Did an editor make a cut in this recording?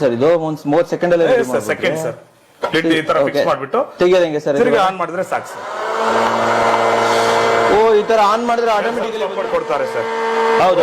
yes; 1 cut; at 9.1 s

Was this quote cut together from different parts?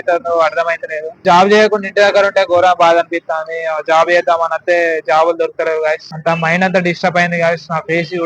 yes; 2 cuts; at 1.2 s, 6.1 s

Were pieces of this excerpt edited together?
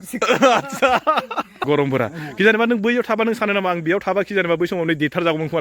yes; 1 cut; at 1.5 s

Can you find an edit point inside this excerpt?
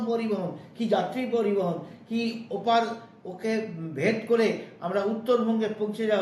no; 0 cuts

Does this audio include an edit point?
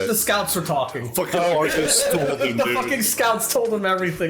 no; 0 cuts

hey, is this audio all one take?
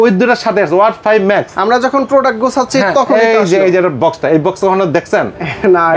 yes; 0 cuts

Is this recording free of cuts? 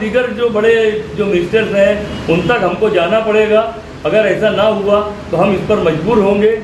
yes; 0 cuts

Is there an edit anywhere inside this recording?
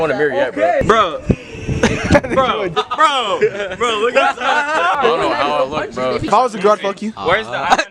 yes; 4 cuts; at 0.8 s, 2.7 s, 5.0 s, 6.3 s

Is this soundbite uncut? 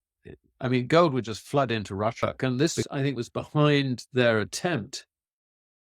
no; 1 cut; at 2.2 s

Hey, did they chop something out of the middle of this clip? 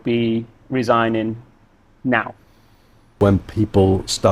yes; 1 cut; at 3.2 s

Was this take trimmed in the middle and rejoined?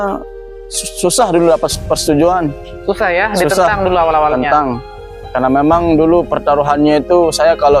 no; 0 cuts

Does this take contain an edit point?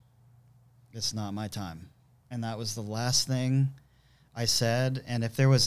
no; 0 cuts

